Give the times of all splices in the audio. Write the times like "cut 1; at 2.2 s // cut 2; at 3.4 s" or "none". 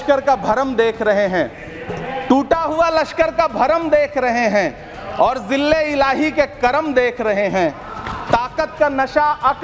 none